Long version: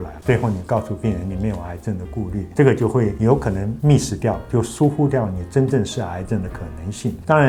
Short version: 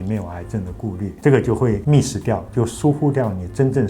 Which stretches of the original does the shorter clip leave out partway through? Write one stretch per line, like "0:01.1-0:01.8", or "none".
0:03.1-0:03.8